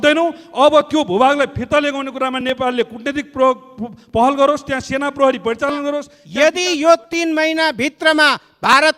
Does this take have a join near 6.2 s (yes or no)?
yes